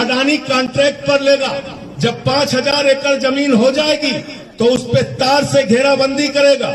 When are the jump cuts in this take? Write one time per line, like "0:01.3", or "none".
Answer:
none

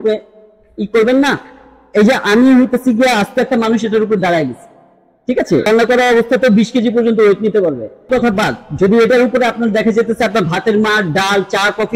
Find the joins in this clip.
0:05.7
0:08.1

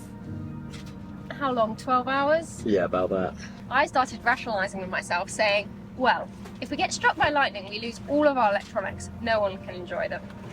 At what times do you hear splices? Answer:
0:03.5

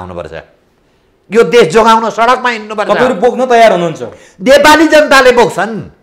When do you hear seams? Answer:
none

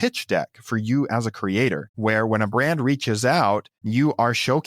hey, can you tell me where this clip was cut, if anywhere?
0:01.9
0:03.7

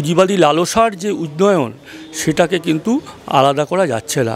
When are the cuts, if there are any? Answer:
none

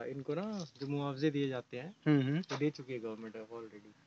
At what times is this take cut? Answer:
none

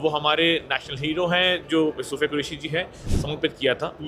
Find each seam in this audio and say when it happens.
0:03.0

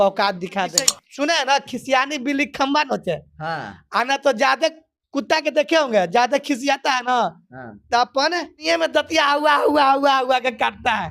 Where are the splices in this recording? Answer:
0:01.0
0:08.6

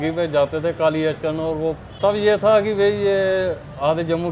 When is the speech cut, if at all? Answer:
0:01.9

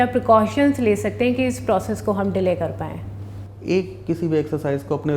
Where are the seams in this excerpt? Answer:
none

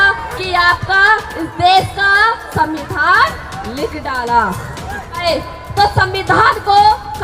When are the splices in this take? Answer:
0:05.2

